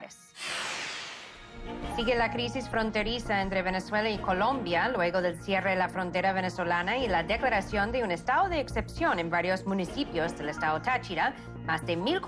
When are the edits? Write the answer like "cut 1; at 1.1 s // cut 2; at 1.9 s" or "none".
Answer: cut 1; at 9.6 s